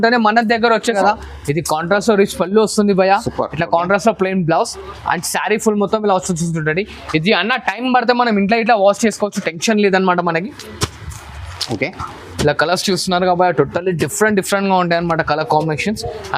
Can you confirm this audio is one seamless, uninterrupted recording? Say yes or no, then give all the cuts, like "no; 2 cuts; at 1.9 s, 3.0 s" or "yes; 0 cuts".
no; 1 cut; at 1.0 s